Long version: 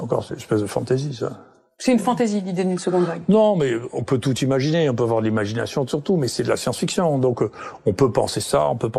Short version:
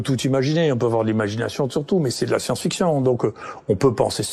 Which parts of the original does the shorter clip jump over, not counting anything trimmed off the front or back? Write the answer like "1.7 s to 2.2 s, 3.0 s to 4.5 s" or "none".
none